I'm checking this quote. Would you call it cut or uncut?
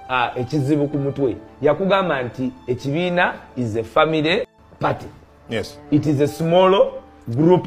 cut